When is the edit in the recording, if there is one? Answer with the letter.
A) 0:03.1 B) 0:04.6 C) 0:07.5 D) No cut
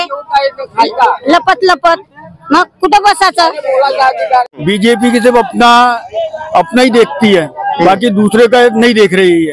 B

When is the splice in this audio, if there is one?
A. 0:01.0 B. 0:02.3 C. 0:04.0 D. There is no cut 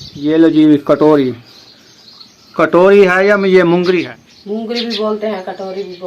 C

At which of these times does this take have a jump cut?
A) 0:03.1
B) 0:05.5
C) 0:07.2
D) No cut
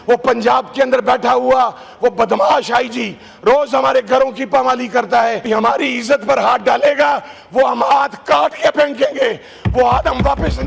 B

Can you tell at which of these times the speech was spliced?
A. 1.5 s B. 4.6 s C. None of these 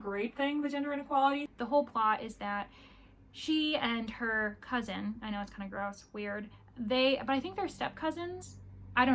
A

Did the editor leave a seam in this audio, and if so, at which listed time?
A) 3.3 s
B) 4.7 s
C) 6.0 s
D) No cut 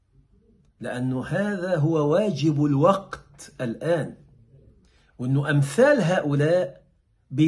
D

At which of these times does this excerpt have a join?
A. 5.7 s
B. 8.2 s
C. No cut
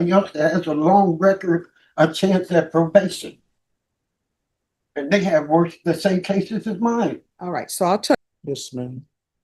B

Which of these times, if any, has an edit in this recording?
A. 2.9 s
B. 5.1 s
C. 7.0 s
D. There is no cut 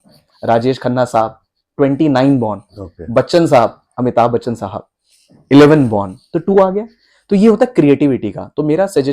D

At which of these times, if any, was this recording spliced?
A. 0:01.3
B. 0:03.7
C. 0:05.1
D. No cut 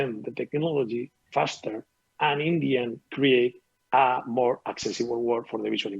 A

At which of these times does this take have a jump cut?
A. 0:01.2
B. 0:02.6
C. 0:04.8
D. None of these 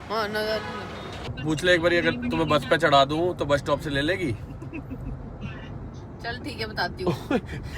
A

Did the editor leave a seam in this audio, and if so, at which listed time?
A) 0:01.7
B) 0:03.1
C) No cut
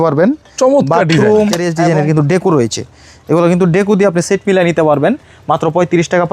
A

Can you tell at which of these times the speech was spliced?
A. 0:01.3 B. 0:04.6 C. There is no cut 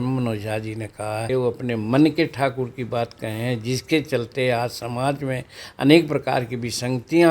A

